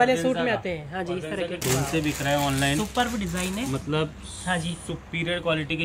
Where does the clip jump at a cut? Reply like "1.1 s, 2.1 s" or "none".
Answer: 1.6 s